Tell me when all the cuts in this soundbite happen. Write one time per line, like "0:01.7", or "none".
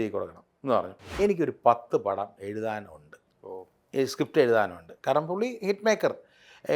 0:01.0